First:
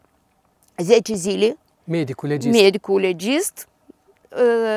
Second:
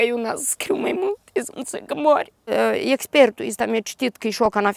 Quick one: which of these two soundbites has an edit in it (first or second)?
second